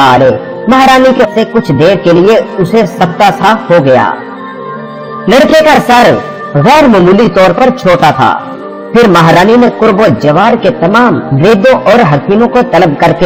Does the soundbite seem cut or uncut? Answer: uncut